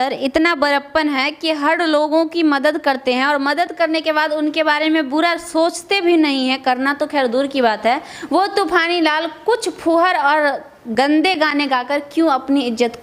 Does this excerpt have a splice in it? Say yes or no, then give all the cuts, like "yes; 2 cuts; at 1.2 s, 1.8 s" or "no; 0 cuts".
no; 0 cuts